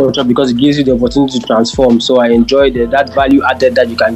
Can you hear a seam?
no; 0 cuts

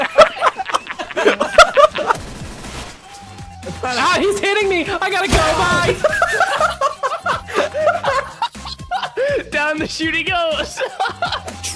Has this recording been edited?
no; 0 cuts

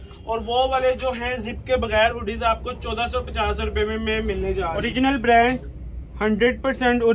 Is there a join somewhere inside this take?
yes; 1 cut; at 4.8 s

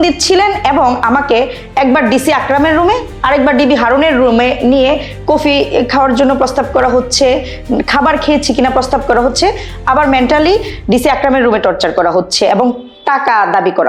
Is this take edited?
no; 0 cuts

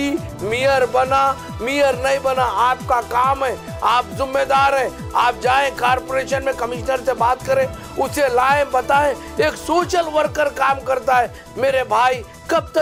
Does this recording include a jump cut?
no; 0 cuts

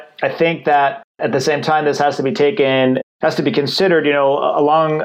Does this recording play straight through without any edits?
no; 2 cuts; at 1.2 s, 3.0 s

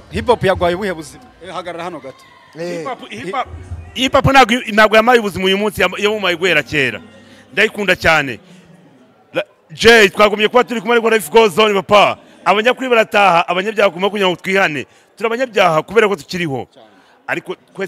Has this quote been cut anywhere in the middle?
no; 0 cuts

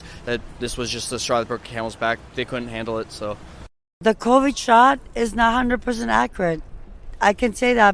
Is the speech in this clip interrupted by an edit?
yes; 1 cut; at 4.0 s

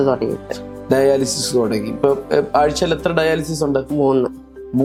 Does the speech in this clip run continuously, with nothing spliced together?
yes; 0 cuts

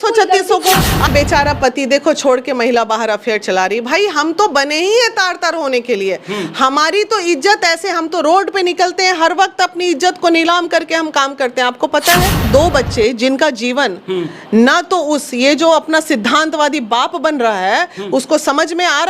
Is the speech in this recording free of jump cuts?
no; 2 cuts; at 1.1 s, 12.4 s

